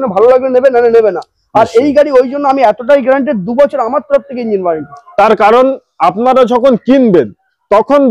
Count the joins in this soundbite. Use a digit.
0